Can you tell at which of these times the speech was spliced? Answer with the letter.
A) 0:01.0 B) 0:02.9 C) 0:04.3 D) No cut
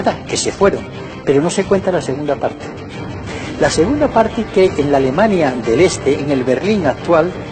A